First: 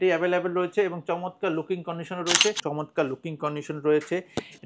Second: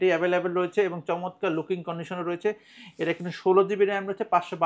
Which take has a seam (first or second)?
first